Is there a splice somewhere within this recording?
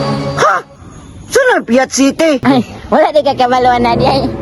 yes; 1 cut; at 2.4 s

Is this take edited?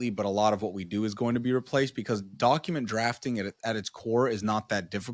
no; 0 cuts

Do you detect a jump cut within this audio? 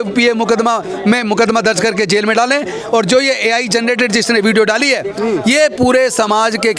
no; 0 cuts

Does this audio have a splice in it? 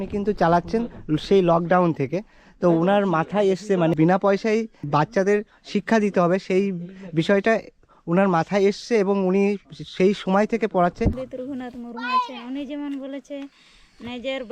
yes; 3 cuts; at 3.9 s, 4.8 s, 11.2 s

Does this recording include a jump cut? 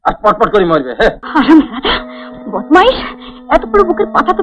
yes; 1 cut; at 1.2 s

